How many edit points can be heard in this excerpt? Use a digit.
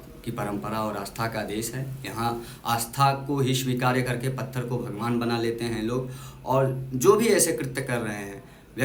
0